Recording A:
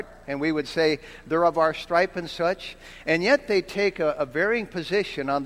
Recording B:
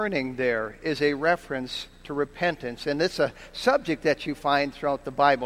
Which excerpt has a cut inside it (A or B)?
A